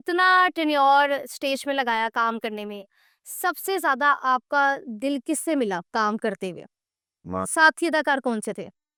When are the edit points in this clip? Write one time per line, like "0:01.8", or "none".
none